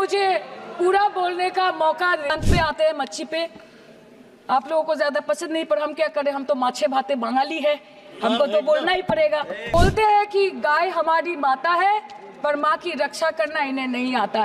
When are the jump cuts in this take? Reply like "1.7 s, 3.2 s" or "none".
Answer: 2.3 s, 9.7 s